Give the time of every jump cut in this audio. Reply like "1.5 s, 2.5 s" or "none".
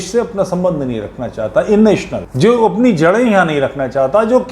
2.2 s